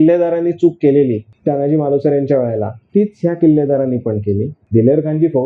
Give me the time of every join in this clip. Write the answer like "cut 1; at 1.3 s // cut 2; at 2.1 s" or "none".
cut 1; at 1.3 s // cut 2; at 4.5 s